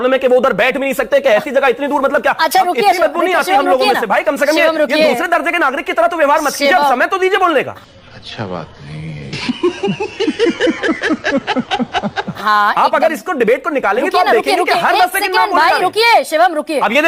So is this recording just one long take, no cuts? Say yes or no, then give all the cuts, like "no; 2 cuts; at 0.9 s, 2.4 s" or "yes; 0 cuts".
yes; 0 cuts